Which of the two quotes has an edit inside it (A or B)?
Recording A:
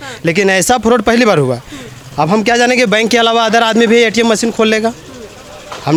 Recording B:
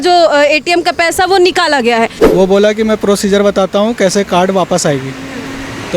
B